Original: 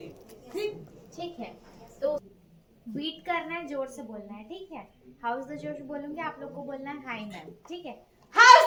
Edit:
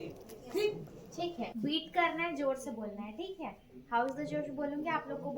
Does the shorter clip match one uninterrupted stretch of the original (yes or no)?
no